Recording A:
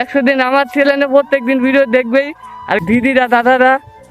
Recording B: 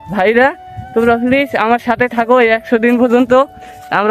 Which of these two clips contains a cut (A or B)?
A